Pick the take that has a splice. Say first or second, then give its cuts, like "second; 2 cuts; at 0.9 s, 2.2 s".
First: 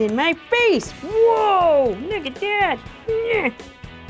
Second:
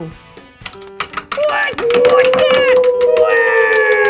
first; 1 cut; at 2.9 s